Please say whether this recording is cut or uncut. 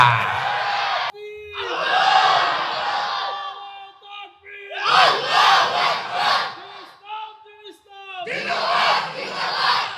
cut